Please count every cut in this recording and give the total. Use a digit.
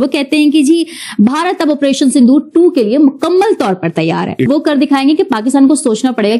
1